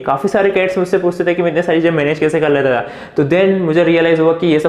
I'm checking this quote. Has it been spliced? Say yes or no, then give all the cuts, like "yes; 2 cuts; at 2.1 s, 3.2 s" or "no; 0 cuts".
no; 0 cuts